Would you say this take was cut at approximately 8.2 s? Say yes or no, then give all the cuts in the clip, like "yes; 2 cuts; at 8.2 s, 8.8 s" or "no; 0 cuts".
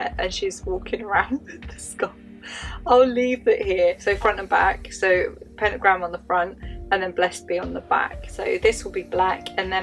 yes; 2 cuts; at 4.0 s, 8.2 s